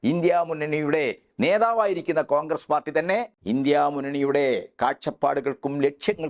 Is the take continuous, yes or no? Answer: no